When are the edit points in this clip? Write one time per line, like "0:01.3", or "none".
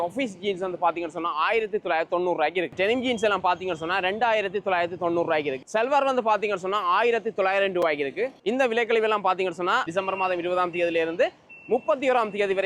0:02.7
0:05.6
0:08.4
0:09.9